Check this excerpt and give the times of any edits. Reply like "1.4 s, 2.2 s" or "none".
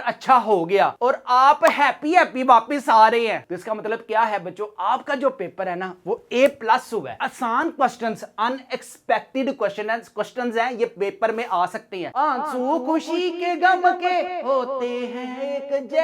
3.4 s, 7.2 s, 12.1 s